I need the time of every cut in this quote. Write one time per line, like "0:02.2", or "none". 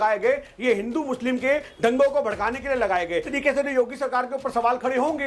0:03.3